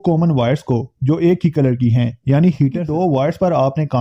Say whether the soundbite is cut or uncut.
cut